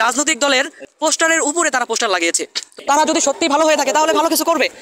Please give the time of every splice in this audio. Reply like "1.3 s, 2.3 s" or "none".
2.7 s